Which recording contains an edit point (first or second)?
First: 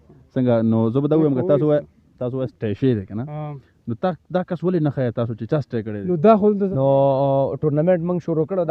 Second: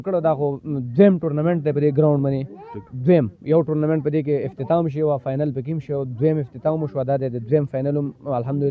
first